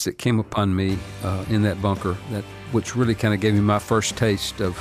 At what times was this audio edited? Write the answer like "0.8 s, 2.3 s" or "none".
2.6 s